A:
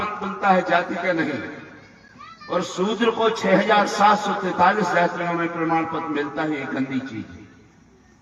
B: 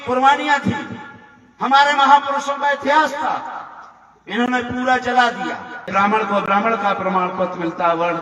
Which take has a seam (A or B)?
B